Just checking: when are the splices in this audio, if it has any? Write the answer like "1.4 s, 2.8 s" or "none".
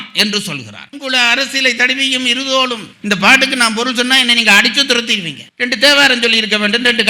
0.9 s, 5.4 s